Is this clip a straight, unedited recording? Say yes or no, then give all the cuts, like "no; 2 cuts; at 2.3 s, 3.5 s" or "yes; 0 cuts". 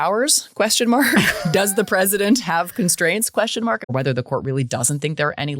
no; 1 cut; at 3.8 s